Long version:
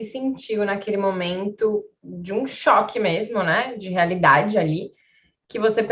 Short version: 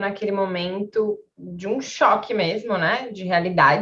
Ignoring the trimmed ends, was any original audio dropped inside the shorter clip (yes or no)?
no